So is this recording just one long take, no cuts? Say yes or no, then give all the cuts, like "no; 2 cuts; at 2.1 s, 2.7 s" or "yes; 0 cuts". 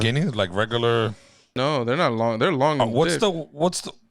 no; 1 cut; at 1.6 s